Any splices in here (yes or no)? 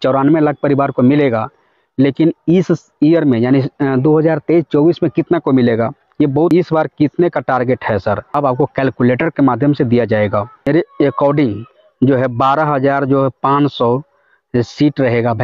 yes